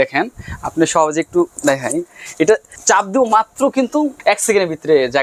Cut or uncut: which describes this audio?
cut